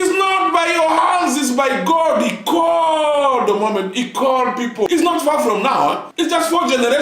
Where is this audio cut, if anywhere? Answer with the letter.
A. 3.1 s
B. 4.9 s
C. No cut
B